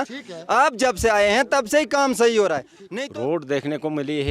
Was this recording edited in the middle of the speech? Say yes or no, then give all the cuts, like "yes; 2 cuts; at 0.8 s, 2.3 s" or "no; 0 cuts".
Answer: yes; 1 cut; at 2.8 s